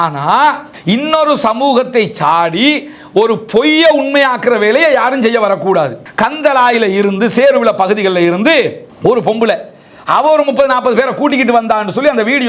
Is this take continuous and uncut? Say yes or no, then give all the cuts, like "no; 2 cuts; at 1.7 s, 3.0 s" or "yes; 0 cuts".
no; 1 cut; at 6.0 s